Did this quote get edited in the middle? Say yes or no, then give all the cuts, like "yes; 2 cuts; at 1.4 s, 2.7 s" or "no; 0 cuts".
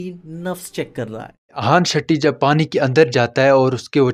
no; 0 cuts